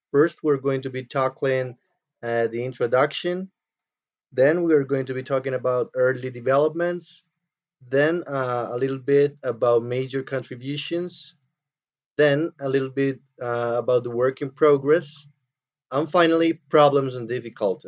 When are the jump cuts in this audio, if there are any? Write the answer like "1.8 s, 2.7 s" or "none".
16.1 s